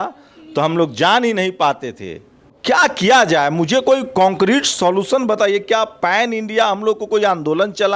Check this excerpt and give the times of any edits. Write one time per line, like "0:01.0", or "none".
none